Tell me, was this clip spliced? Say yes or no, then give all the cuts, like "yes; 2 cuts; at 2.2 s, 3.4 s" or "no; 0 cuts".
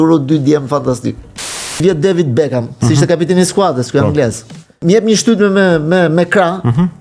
yes; 2 cuts; at 1.8 s, 4.8 s